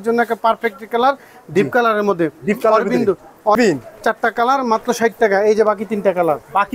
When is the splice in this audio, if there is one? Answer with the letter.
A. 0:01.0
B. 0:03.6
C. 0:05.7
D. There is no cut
B